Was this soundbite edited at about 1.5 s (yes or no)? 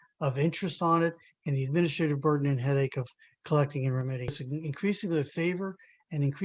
no